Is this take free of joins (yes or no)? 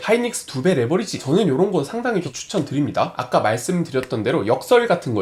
yes